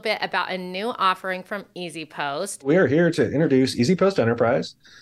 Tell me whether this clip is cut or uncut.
cut